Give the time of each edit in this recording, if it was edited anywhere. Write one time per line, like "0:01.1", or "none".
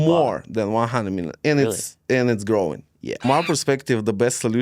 0:03.2